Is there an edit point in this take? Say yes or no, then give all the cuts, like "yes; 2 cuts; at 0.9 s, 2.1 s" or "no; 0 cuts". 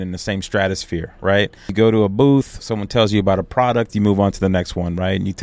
yes; 1 cut; at 1.7 s